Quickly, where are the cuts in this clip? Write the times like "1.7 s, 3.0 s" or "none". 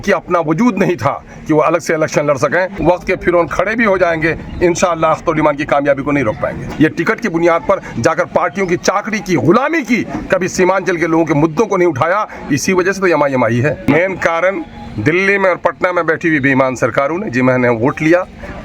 2.7 s, 6.6 s, 13.9 s